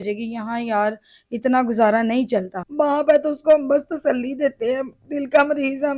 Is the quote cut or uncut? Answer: cut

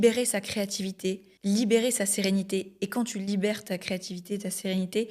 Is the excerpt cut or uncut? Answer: cut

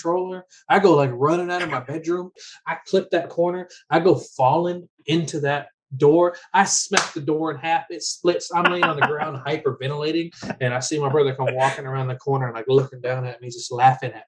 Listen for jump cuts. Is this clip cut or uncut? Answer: cut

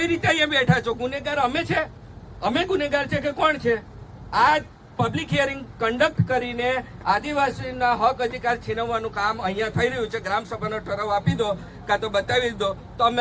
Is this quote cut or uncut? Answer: uncut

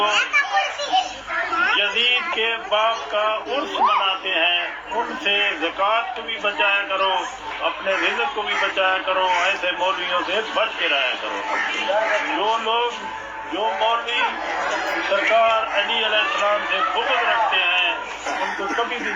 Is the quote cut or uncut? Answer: uncut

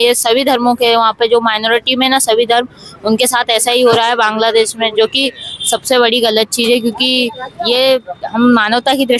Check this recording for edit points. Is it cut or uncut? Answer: uncut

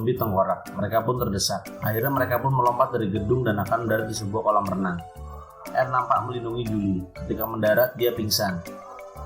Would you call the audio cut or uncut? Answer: cut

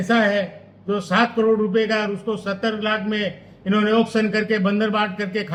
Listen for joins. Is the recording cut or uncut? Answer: uncut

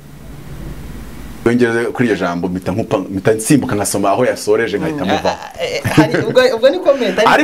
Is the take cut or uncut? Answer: cut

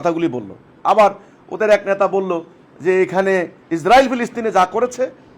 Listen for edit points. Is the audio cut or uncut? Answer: cut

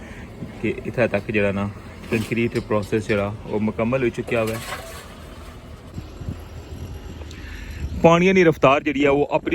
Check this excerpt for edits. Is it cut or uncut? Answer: cut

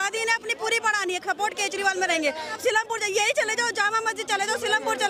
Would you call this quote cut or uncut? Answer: uncut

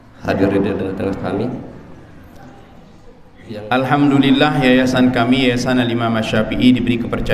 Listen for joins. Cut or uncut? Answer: cut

